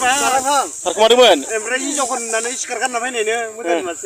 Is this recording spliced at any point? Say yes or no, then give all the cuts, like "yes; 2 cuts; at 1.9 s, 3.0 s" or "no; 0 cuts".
no; 0 cuts